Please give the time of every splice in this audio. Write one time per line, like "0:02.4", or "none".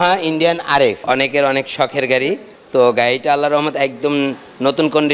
0:01.0
0:02.5